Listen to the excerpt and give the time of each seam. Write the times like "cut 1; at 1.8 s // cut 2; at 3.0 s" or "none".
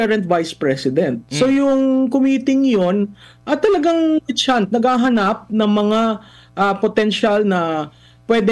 cut 1; at 1.2 s

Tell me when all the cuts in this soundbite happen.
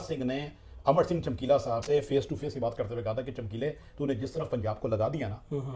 cut 1; at 1.8 s

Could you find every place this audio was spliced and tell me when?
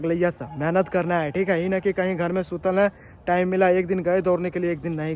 none

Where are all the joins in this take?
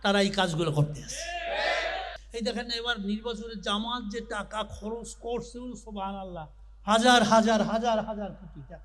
cut 1; at 2.1 s

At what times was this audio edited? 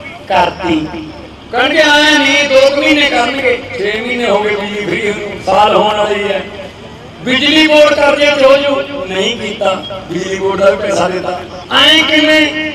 cut 1; at 11.5 s

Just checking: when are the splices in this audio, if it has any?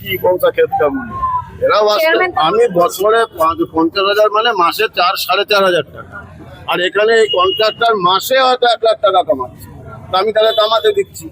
cut 1; at 2.3 s

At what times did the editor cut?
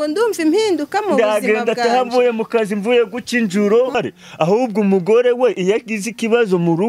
cut 1; at 4.0 s

